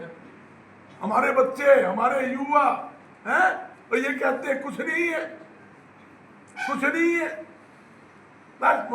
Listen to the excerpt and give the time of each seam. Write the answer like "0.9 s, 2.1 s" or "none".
none